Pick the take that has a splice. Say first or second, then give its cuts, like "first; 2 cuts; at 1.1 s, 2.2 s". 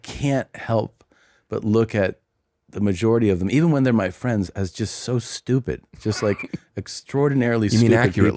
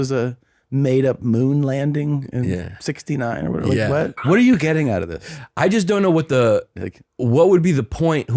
second; 1 cut; at 4.2 s